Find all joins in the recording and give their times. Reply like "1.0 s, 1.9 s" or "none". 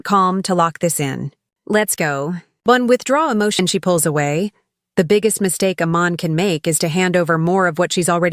3.6 s